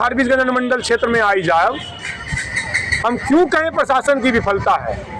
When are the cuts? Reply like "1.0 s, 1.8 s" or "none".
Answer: none